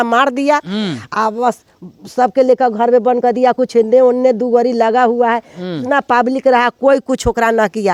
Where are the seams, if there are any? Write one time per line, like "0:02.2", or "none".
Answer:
none